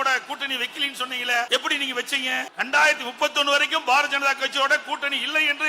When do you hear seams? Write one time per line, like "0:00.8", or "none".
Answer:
0:01.5
0:02.5